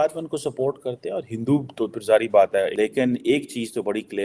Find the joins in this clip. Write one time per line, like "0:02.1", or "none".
0:02.7

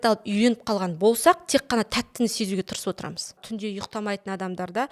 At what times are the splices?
0:03.4

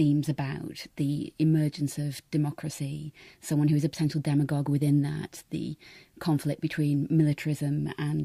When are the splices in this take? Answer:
none

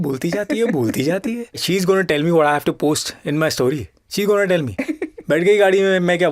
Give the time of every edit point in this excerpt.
none

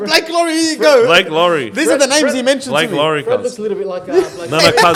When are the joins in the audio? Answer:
none

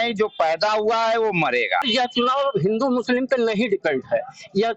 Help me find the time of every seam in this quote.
0:01.8

